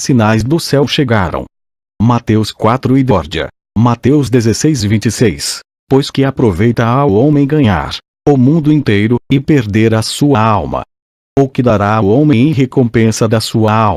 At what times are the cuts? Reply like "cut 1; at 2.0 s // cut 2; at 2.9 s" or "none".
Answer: none